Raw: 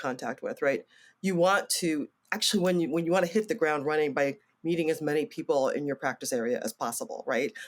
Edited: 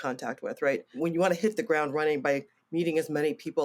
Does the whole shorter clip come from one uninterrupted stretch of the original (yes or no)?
no